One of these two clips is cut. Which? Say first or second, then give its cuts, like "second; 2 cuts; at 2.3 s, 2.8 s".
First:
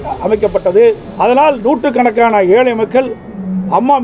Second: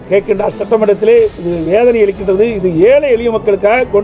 first; 1 cut; at 1.1 s